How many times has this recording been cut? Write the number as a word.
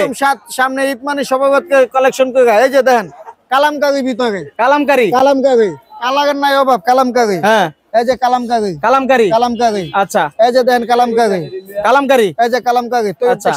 zero